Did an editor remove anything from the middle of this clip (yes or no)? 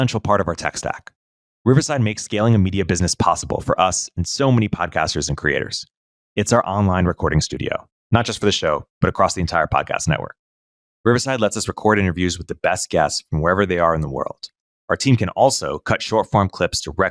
no